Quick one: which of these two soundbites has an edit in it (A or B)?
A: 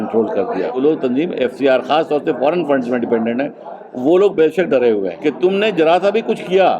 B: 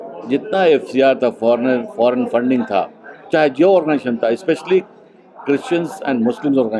A